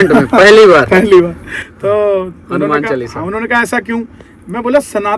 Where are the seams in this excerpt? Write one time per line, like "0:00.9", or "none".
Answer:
none